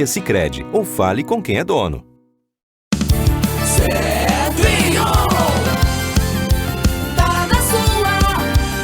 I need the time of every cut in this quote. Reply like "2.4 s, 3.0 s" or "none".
2.5 s